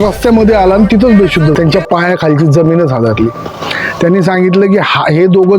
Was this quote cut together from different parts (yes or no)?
yes